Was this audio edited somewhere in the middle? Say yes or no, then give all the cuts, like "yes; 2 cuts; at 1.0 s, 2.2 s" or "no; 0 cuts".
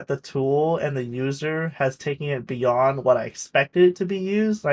no; 0 cuts